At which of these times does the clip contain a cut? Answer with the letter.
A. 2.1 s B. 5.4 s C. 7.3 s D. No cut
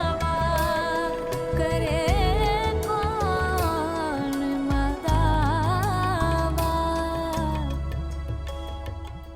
C